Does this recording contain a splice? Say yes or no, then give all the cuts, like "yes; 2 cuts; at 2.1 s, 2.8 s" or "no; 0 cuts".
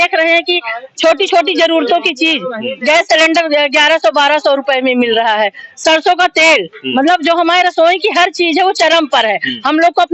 no; 0 cuts